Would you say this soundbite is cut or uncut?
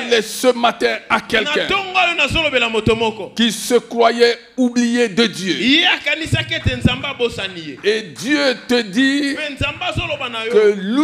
uncut